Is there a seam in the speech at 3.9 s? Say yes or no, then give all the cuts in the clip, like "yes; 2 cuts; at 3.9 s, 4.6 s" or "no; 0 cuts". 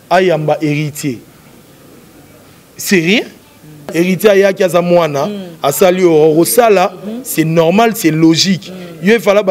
yes; 1 cut; at 3.9 s